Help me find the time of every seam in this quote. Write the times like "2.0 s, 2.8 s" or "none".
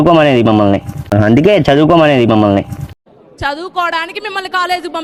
none